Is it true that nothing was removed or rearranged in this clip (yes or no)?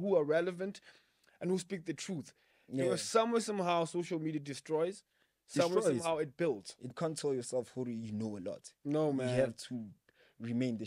no